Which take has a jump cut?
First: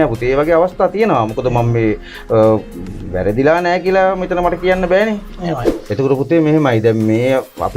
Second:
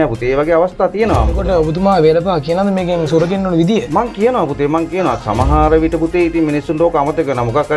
second; 1 cut; at 1.4 s

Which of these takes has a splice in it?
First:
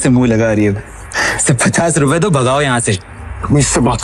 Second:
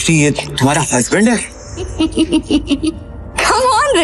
second; 1 cut; at 1.9 s

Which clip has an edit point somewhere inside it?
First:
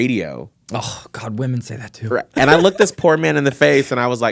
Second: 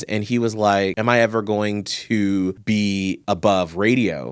second; 2 cuts; at 1.0 s, 3.0 s

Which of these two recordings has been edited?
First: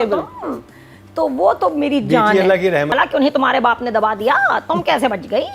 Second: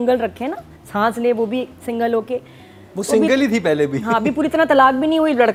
first; 1 cut; at 2.9 s

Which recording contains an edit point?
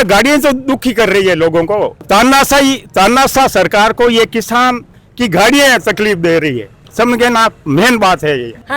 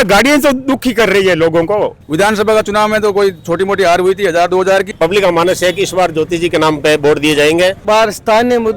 second; 3 cuts; at 2.0 s, 4.9 s, 7.8 s

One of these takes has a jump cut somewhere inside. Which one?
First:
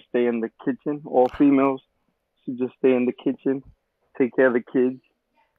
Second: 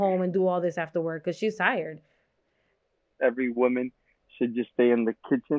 second; 1 cut; at 3.0 s

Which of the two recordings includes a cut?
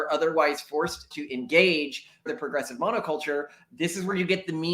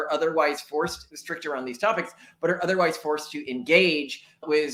first; 2 cuts; at 1.2 s, 2.3 s

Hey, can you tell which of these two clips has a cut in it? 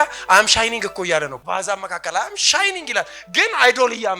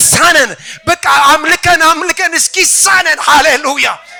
first; 1 cut; at 1.4 s

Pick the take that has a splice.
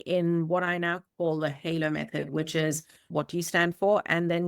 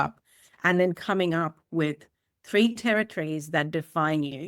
first; 1 cut; at 3.1 s

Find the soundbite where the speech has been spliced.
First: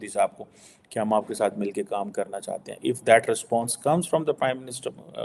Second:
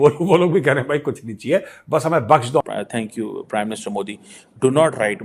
second; 1 cut; at 2.6 s

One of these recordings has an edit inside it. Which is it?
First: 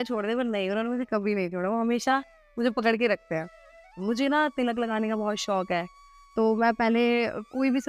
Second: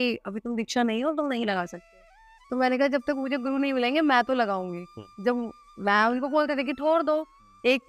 first; 1 cut; at 3.9 s

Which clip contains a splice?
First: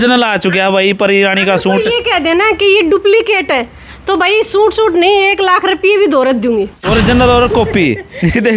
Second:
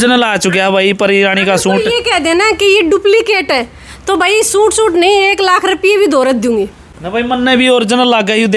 first; 1 cut; at 6.8 s

